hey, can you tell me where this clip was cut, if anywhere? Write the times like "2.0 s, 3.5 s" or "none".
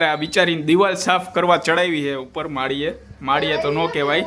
none